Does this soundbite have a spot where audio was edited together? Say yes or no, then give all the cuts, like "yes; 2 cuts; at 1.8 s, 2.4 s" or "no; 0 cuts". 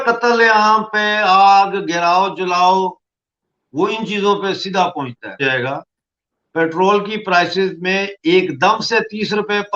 yes; 1 cut; at 5.4 s